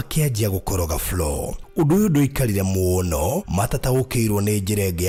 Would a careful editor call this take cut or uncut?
uncut